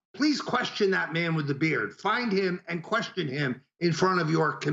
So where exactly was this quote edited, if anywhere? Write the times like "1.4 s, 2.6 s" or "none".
none